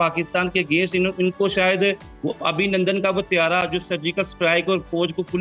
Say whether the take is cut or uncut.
uncut